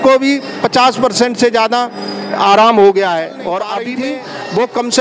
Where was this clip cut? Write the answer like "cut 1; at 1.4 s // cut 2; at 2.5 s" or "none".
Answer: cut 1; at 3.8 s